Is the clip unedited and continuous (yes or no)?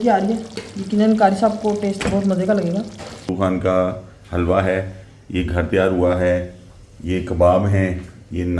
no